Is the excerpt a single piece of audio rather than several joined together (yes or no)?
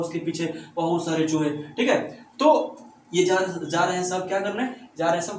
yes